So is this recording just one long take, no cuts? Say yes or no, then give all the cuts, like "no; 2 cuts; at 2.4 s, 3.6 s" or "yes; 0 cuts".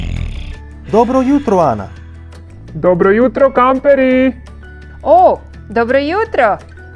yes; 0 cuts